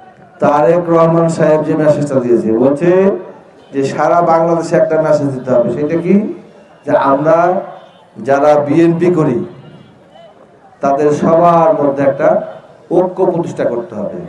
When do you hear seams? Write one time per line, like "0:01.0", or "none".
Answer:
none